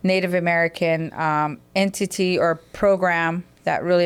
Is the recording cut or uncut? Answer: uncut